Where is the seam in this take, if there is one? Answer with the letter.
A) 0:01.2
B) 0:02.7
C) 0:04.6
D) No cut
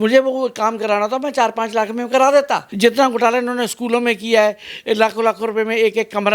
B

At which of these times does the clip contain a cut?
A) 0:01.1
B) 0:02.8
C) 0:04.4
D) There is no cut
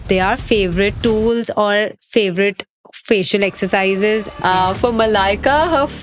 C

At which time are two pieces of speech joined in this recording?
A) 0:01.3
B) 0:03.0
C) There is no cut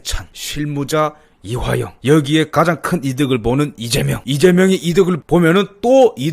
C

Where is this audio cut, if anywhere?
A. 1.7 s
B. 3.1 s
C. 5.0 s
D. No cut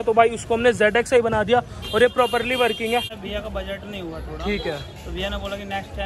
B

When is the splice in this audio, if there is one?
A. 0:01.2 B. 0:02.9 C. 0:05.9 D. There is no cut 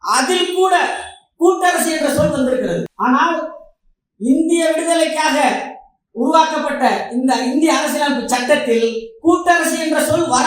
B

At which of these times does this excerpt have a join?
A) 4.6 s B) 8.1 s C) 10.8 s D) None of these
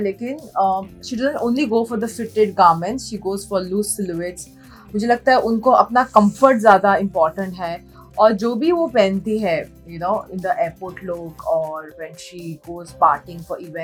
D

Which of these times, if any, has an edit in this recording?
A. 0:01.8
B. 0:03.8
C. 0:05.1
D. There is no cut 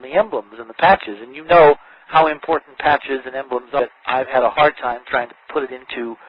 D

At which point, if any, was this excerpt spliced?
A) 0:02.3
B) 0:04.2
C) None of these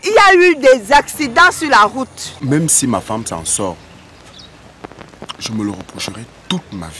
A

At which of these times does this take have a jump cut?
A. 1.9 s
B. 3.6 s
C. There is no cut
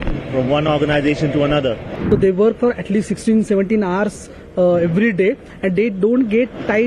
A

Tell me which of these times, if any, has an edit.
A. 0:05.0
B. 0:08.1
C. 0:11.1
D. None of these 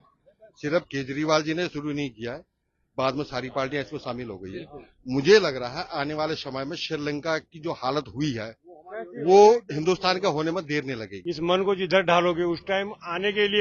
C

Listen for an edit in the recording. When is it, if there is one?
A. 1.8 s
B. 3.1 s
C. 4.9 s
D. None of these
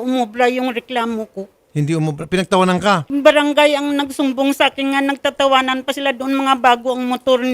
B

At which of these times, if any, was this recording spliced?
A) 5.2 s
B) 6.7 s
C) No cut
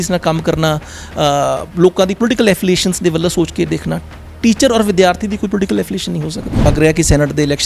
B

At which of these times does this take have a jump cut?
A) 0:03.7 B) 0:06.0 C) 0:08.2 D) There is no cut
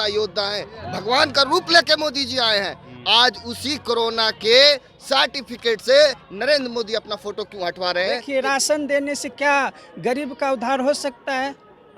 C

